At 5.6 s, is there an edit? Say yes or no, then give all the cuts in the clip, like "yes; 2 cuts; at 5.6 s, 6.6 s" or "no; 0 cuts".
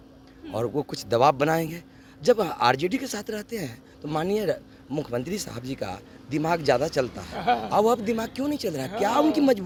no; 0 cuts